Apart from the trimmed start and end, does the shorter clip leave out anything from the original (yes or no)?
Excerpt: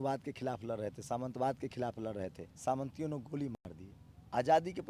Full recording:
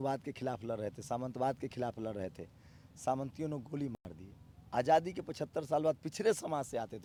yes